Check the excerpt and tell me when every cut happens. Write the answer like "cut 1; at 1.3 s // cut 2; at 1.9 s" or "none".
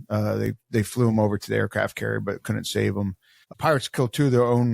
cut 1; at 3.5 s